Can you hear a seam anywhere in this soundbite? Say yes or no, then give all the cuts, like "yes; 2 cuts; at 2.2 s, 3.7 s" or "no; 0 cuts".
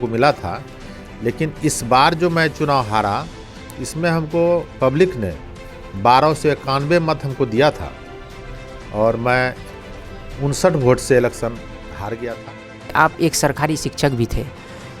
yes; 1 cut; at 12.8 s